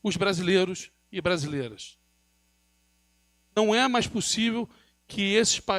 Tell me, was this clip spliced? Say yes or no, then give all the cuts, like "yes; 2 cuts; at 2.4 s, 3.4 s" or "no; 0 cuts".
no; 0 cuts